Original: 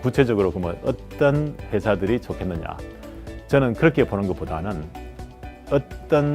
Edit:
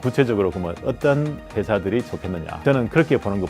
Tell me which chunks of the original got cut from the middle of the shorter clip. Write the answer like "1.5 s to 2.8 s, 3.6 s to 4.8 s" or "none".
1.0 s to 1.1 s, 2.7 s to 3.4 s